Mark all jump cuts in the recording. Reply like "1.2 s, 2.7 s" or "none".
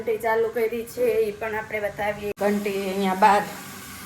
2.3 s